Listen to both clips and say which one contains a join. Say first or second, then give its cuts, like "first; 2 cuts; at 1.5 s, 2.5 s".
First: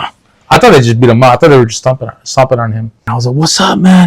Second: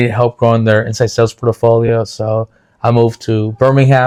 first; 1 cut; at 3.0 s